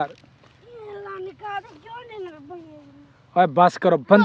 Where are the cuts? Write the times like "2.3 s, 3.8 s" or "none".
none